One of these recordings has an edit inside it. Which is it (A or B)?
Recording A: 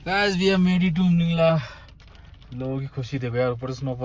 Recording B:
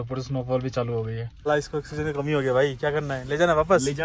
B